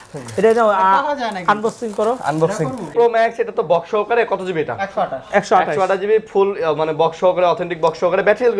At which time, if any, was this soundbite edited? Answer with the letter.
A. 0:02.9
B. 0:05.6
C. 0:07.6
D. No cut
A